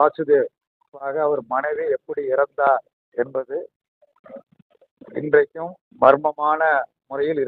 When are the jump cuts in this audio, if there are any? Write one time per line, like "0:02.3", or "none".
0:00.9